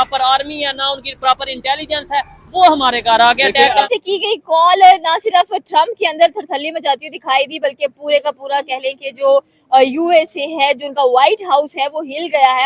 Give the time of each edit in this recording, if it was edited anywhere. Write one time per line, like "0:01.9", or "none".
0:03.8

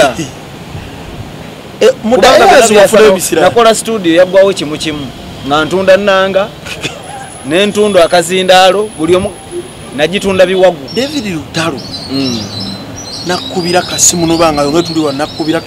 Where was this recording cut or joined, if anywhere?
0:10.8

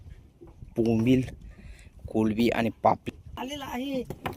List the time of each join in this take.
0:03.0

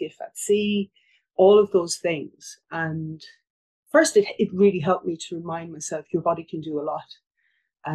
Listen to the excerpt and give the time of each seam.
0:03.5

